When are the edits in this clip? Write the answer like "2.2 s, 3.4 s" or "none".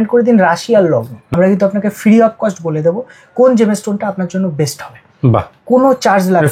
1.2 s